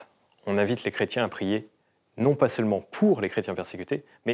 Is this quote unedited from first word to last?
yes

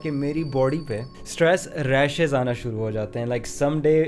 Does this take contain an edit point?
no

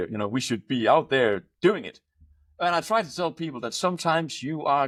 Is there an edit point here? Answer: no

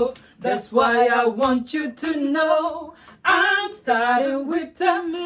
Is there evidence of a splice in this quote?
no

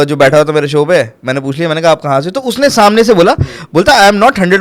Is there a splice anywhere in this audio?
no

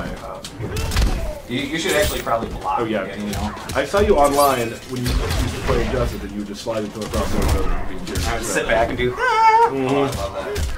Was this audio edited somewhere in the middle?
yes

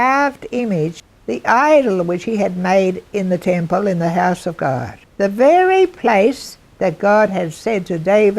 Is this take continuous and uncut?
no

